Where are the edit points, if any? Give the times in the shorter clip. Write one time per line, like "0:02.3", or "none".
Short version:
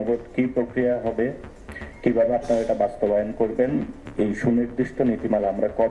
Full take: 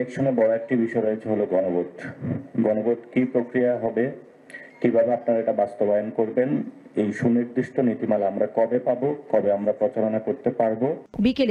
none